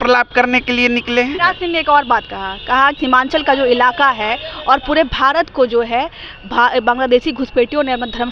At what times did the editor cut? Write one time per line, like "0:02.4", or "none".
0:01.4
0:03.0

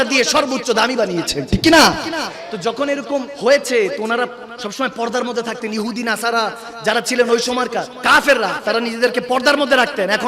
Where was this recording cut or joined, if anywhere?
0:03.3
0:07.9

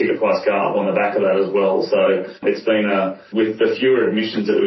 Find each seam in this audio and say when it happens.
0:02.3
0:03.2

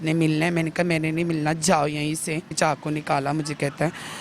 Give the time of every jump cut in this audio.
0:02.5

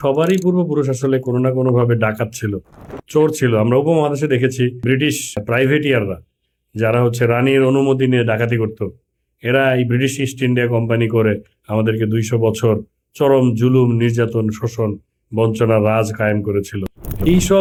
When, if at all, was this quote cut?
none

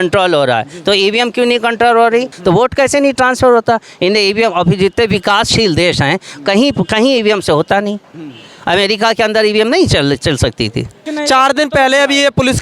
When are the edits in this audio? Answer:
0:02.3
0:11.0

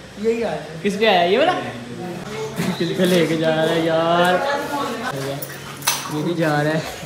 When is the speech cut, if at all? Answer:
0:02.2
0:05.1

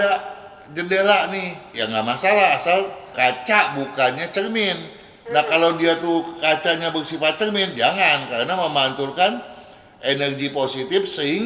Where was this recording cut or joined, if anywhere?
0:01.8

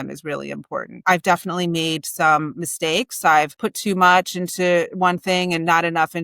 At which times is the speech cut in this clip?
0:01.0
0:03.5

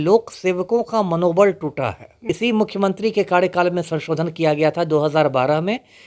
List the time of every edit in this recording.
0:02.1

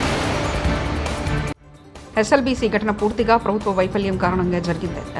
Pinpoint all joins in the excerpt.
0:01.4

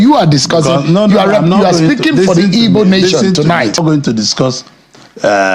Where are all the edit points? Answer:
0:03.8

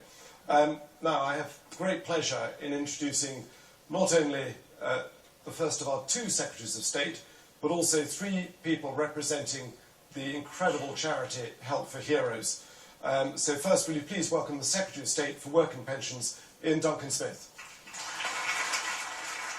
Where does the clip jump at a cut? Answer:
0:12.5

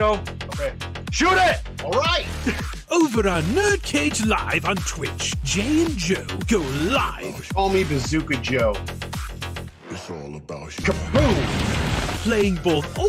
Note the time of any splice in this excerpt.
none

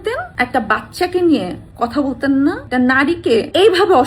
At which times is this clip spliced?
none

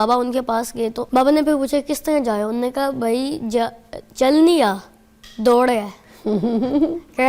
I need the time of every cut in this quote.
0:01.0

